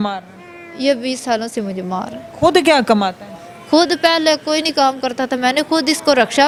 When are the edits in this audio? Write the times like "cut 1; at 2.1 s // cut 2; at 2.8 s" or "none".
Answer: none